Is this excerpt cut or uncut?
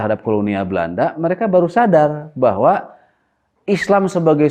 uncut